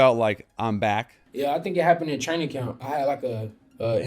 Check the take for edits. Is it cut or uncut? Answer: cut